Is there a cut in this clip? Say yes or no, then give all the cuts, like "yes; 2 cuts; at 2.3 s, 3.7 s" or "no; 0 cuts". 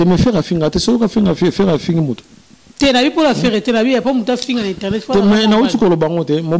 no; 0 cuts